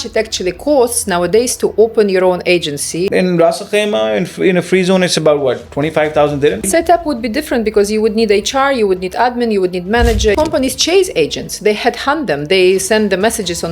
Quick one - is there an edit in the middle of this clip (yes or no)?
yes